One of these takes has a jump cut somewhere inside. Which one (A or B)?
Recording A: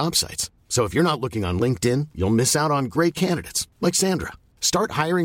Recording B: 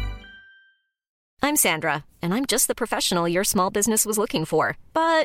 B